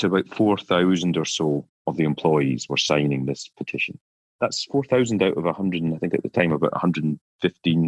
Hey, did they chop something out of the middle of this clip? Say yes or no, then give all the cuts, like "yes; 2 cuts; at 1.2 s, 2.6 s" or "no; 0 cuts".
no; 0 cuts